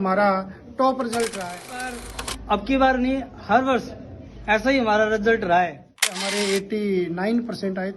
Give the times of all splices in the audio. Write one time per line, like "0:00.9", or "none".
0:02.0
0:06.2